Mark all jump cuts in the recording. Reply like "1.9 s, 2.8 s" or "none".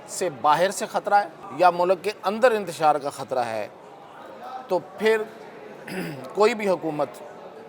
1.4 s